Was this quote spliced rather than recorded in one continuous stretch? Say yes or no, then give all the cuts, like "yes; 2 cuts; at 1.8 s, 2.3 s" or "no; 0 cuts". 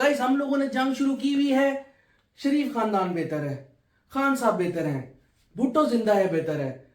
no; 0 cuts